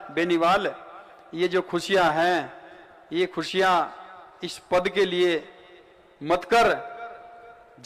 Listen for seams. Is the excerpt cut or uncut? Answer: uncut